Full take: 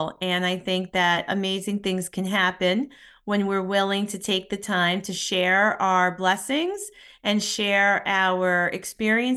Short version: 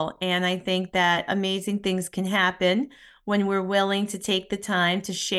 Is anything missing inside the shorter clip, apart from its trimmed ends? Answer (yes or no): no